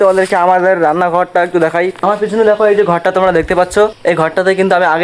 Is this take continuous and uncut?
no; 2 cuts; at 1.9 s, 4.0 s

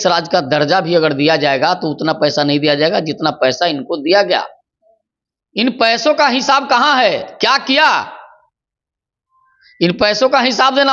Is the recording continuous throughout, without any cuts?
yes; 0 cuts

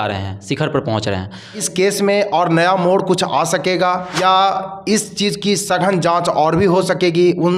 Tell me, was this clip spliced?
yes; 2 cuts; at 1.7 s, 4.1 s

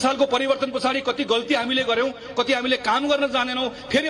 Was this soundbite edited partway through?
no; 0 cuts

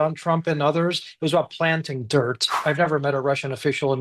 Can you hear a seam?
yes; 1 cut; at 2.6 s

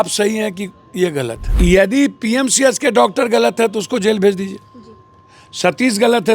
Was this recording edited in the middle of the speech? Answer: yes; 1 cut; at 1.4 s

